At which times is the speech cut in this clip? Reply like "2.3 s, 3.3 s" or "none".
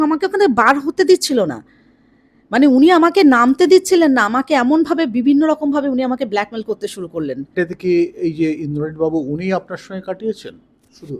7.5 s